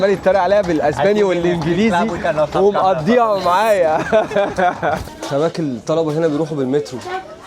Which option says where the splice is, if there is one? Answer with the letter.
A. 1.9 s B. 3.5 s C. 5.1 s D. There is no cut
C